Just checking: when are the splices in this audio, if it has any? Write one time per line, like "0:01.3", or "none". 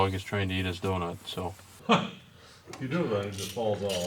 0:01.7